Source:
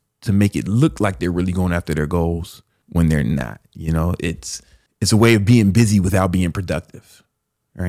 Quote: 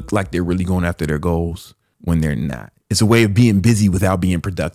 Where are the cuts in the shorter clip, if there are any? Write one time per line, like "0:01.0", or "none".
0:02.7